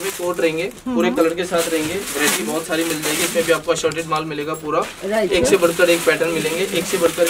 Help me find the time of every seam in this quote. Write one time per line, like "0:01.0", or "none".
none